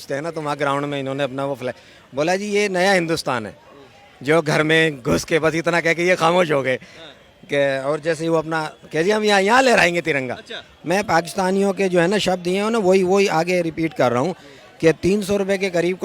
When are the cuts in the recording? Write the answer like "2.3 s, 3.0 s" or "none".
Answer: 10.7 s